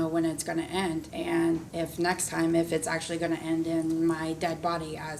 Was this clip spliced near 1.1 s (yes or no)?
yes